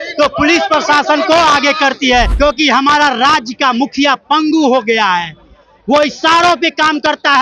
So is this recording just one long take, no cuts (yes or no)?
no